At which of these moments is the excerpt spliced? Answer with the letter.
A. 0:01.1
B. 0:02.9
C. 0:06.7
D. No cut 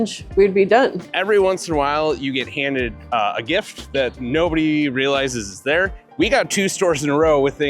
A